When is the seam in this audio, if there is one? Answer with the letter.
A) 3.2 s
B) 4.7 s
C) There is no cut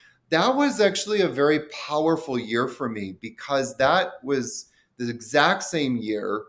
C